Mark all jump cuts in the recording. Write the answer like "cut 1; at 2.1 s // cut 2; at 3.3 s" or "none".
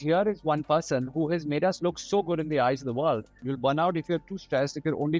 cut 1; at 3.5 s